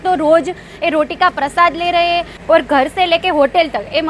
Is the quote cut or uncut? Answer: cut